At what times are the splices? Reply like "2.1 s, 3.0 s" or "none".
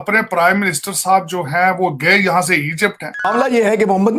3.3 s